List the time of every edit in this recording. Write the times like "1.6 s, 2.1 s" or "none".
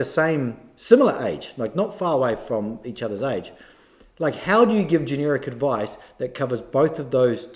none

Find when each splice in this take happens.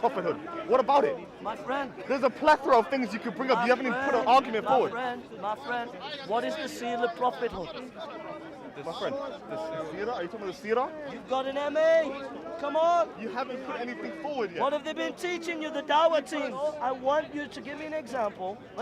16.7 s

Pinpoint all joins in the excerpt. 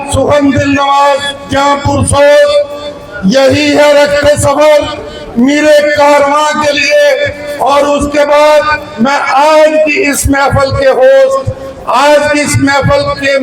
none

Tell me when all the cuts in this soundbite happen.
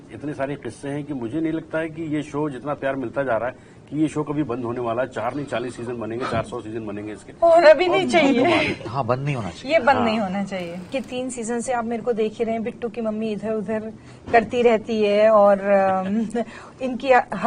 10.9 s

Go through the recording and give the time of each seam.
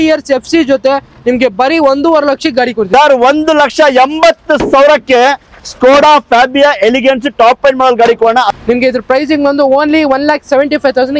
2.9 s, 8.5 s

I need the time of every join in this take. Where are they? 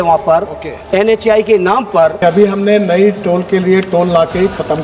2.2 s

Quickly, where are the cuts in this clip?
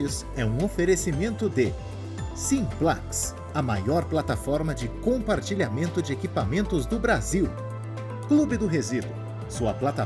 none

